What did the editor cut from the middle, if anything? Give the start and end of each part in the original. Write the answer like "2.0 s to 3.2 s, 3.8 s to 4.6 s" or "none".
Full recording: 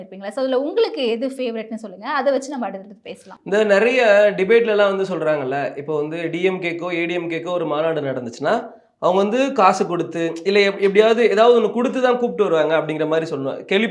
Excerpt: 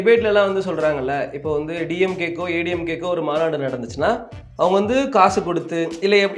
none